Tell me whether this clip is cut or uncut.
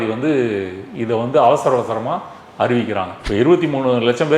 cut